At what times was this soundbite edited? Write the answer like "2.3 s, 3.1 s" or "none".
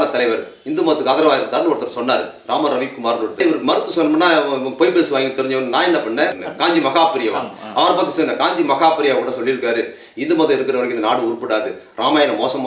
3.4 s, 6.4 s

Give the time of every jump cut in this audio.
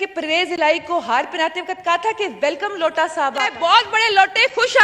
3.5 s

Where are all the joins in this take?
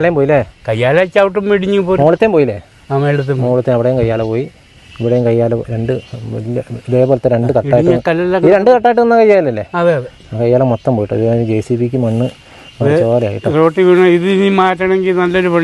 none

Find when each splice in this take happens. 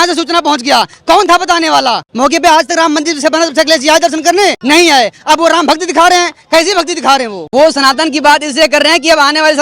2.1 s, 4.6 s, 7.4 s

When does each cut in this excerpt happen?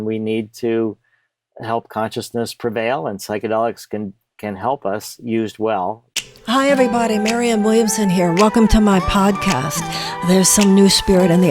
6.1 s

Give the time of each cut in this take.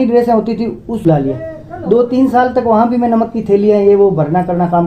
1.0 s

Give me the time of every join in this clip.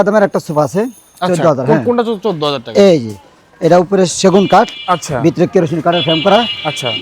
none

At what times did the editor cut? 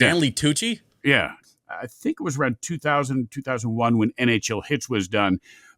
1.4 s

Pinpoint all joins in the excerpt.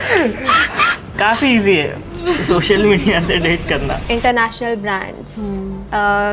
1.1 s, 4.0 s

